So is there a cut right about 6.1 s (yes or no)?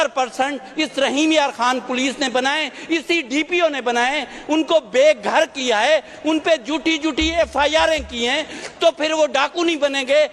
no